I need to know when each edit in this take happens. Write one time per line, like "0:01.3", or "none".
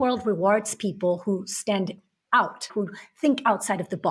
0:02.7